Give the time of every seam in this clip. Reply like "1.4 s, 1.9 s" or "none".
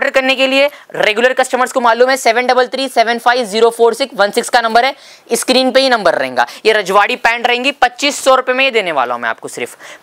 none